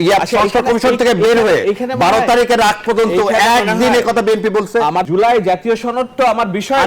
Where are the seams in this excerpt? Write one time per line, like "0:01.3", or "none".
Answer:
0:05.0